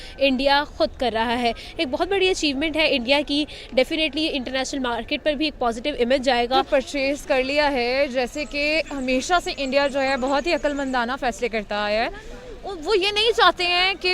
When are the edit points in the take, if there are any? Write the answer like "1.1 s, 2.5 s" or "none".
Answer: 6.6 s